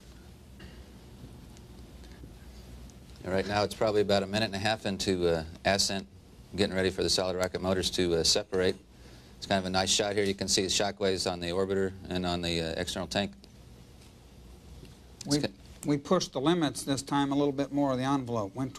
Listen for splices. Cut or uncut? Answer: uncut